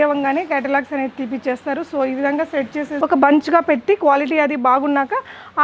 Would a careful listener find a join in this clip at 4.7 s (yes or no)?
no